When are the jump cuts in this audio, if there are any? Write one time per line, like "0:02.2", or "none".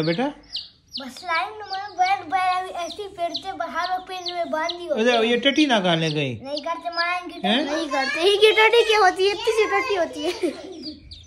none